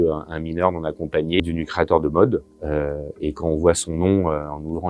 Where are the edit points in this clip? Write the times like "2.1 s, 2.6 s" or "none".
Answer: none